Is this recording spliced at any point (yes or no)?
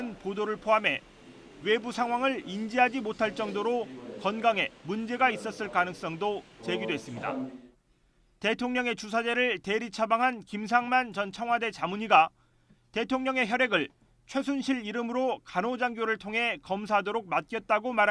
yes